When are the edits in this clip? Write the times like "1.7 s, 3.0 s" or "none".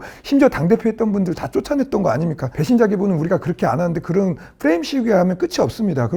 none